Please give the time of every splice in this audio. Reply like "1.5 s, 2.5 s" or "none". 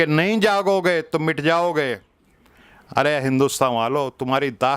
none